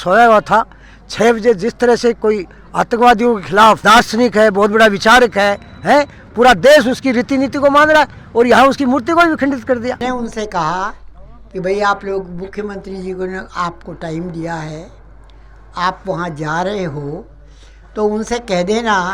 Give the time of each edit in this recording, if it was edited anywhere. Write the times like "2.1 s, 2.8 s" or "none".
3.9 s, 10.0 s